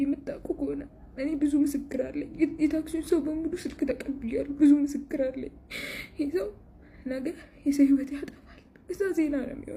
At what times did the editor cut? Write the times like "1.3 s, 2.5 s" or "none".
none